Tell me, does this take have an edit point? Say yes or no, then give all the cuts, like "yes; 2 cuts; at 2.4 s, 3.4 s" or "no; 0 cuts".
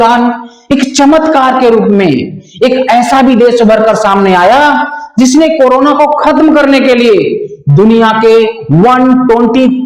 no; 0 cuts